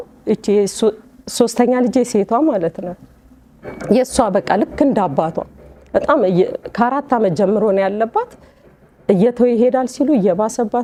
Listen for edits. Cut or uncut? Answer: uncut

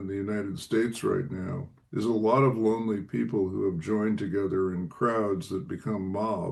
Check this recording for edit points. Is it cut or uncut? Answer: uncut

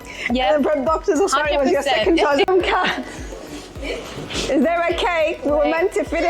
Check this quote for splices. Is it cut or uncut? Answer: cut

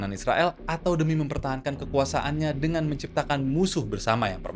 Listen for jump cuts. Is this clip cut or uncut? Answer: uncut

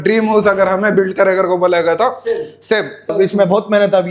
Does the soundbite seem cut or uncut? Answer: cut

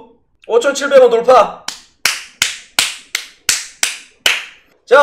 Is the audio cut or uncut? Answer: uncut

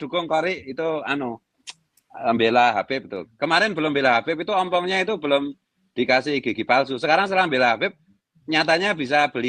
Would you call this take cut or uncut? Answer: uncut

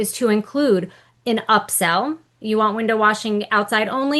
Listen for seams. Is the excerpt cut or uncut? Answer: uncut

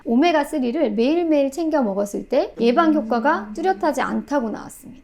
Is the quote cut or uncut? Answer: cut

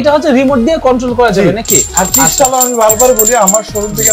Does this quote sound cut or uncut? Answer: uncut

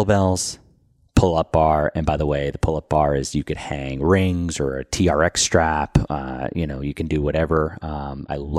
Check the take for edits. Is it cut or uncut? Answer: uncut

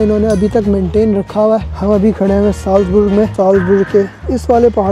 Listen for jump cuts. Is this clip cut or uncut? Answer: cut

